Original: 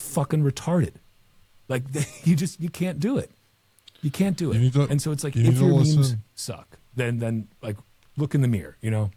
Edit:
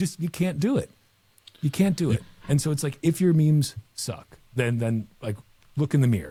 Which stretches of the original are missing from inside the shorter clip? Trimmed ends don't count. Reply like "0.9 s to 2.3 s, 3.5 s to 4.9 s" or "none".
none

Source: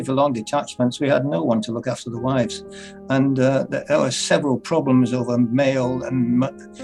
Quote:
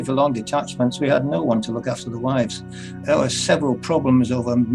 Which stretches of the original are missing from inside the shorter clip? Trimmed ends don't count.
3.0 s to 3.8 s

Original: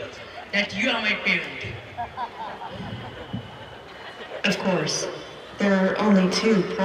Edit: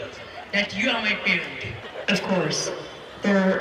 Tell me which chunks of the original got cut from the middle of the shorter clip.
1.7 s to 4.1 s

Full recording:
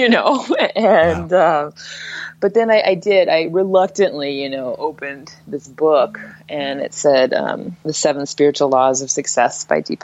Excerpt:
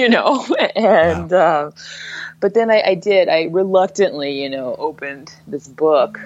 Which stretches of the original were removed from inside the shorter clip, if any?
none

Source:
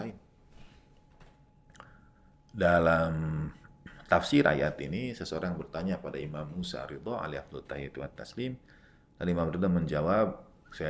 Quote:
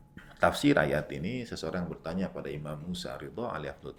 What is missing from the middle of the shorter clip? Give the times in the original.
none

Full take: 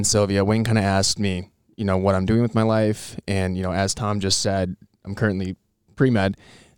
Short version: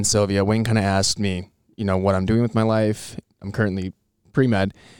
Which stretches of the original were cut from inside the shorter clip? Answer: 3.2 s to 4.8 s

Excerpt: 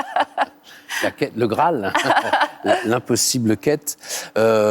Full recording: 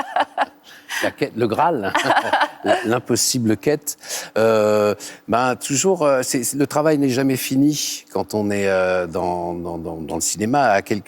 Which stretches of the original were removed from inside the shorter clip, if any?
none

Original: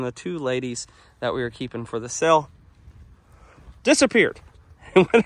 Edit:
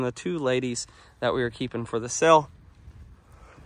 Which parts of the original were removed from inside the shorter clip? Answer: none

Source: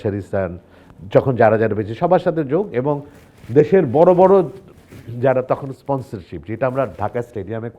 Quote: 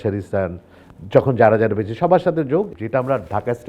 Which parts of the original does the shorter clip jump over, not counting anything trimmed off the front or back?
2.7 s to 6.4 s

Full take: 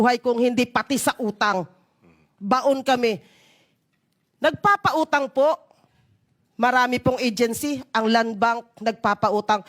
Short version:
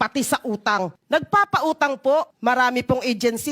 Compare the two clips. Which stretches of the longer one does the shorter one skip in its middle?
1.7 s to 4.3 s, 5.6 s to 6.5 s

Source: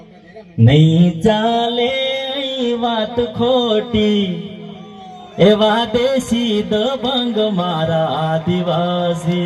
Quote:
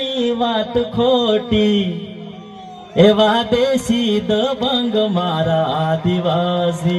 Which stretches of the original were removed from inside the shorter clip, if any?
none

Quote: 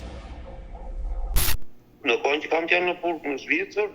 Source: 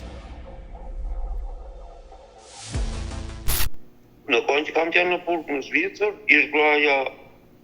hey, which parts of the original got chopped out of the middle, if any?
1.5 s to 3.7 s

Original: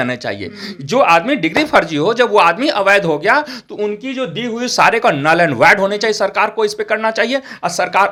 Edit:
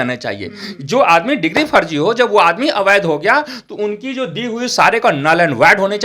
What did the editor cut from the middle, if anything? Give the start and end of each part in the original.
none

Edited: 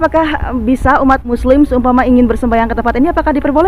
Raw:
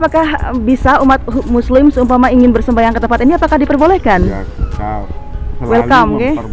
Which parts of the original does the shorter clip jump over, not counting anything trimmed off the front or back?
1.2 s to 1.5 s

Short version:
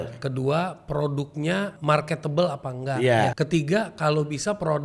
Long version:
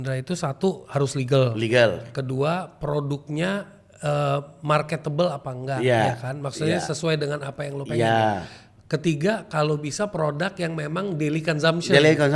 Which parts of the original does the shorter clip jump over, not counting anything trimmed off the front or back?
3.7 s to 4.6 s, 6.1 s to 8.9 s

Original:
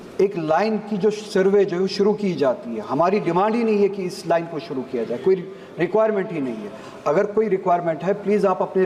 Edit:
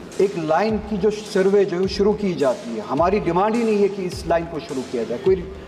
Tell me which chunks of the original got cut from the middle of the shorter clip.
none

